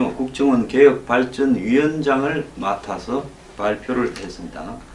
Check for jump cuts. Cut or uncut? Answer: cut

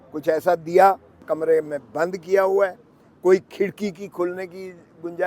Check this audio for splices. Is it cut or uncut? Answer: cut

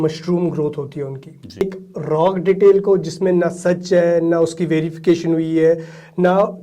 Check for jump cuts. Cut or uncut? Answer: cut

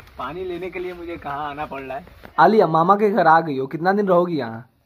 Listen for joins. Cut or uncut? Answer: cut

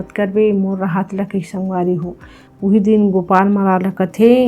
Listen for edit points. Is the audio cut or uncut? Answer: cut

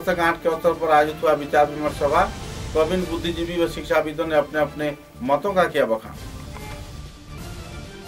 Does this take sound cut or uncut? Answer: uncut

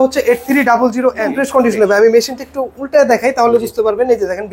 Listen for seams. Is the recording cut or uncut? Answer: cut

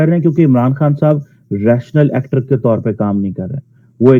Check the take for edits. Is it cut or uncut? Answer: uncut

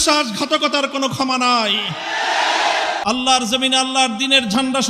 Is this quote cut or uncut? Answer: cut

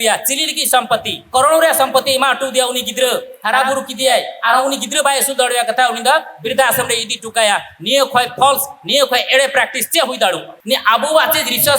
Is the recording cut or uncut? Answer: cut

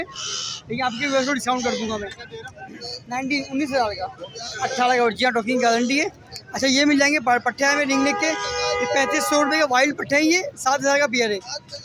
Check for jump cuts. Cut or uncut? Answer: uncut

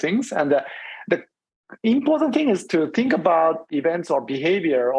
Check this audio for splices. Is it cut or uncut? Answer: cut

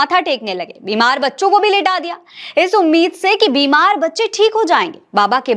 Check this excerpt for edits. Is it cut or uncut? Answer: uncut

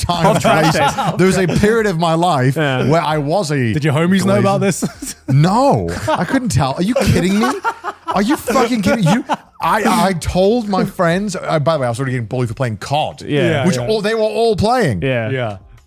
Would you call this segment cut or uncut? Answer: uncut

